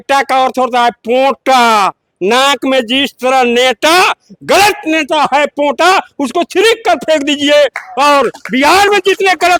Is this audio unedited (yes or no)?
yes